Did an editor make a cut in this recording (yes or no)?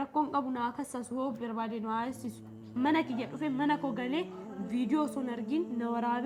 no